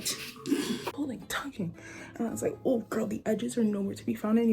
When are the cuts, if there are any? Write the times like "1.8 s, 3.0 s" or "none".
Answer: 0.9 s